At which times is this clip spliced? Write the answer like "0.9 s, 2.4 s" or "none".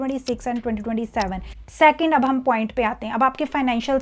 1.6 s